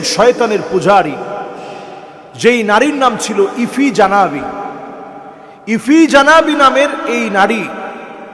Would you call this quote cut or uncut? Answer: uncut